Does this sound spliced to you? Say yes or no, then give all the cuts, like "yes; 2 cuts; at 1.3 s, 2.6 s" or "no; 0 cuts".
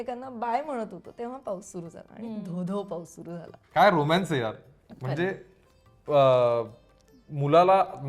yes; 1 cut; at 3.5 s